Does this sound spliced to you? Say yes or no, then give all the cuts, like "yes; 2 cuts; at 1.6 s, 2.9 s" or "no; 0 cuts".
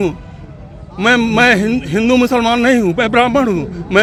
no; 0 cuts